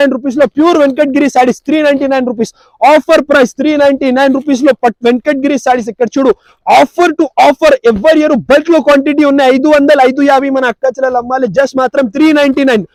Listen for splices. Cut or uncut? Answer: uncut